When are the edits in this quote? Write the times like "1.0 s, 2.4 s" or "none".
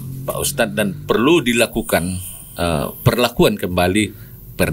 none